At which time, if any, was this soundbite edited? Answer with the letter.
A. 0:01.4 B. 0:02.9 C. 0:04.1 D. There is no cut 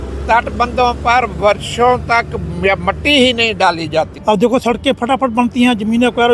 C